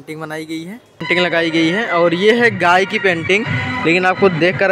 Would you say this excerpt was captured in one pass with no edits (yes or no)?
no